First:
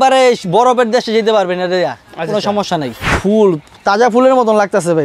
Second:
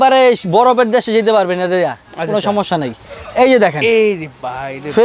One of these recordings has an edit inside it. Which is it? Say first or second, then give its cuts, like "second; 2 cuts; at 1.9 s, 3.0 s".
first; 1 cut; at 3.1 s